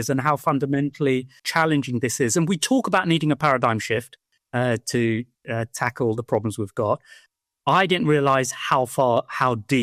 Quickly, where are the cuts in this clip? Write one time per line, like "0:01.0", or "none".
none

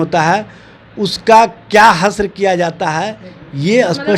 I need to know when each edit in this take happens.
none

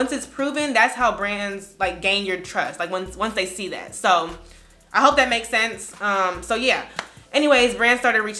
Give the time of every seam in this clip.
none

